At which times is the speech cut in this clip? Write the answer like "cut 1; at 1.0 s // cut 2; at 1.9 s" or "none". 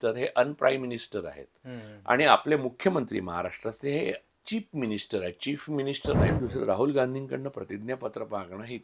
cut 1; at 4.2 s // cut 2; at 6.3 s